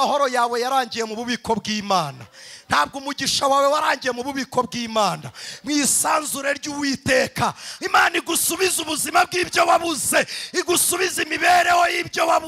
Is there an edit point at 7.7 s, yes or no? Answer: yes